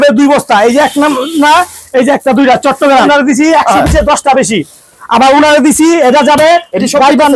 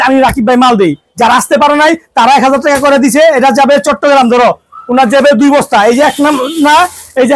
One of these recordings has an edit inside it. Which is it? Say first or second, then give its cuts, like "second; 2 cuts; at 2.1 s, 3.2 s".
first; 1 cut; at 3.1 s